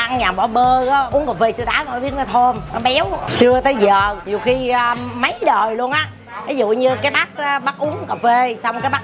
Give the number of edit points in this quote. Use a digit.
3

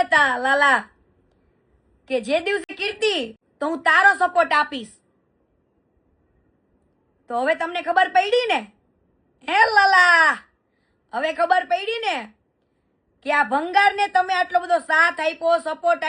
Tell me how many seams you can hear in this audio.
1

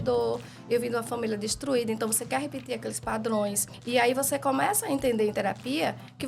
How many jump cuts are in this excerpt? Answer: 1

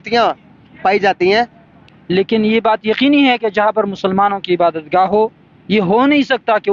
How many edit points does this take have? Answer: 1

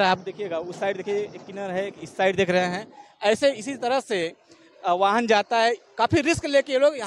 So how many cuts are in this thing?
0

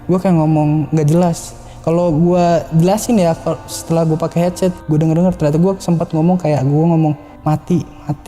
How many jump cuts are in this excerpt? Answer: 1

